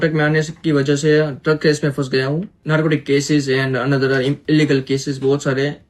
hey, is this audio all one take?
no; 1 cut; at 2.5 s

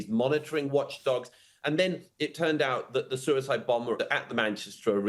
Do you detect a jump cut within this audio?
yes; 1 cut; at 4.0 s

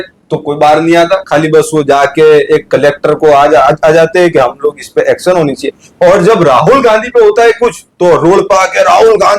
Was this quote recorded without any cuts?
yes; 0 cuts

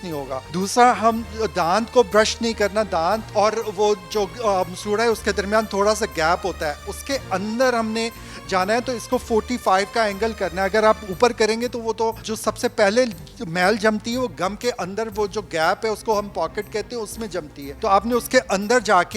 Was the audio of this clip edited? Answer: no; 0 cuts

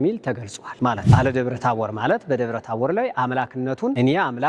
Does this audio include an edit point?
yes; 1 cut; at 1.1 s

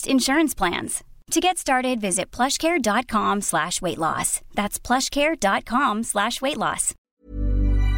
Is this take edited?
yes; 1 cut; at 7.1 s

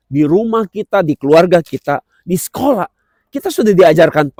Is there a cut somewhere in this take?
no; 0 cuts

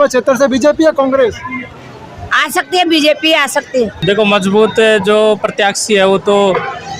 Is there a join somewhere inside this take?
yes; 1 cut; at 4.0 s

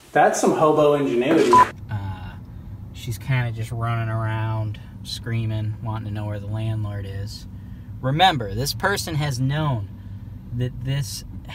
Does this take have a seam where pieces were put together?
yes; 1 cut; at 1.7 s

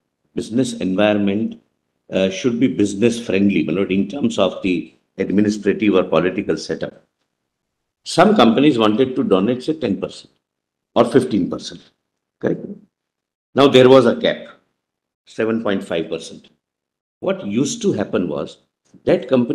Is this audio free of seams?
yes; 0 cuts

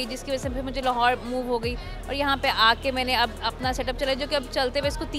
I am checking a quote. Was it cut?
no; 0 cuts

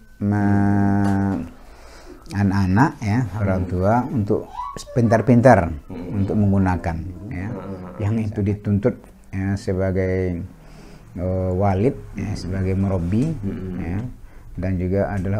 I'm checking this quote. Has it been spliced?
yes; 1 cut; at 7.7 s

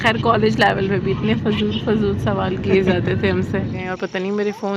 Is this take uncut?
no; 1 cut; at 3.8 s

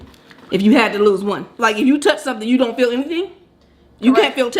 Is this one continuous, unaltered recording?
no; 1 cut; at 1.5 s

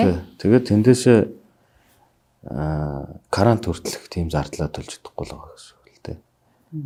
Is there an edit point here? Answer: no; 0 cuts

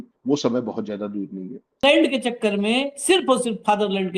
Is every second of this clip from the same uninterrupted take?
no; 1 cut; at 1.8 s

